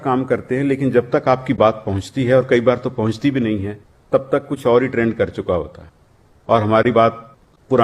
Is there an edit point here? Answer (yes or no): no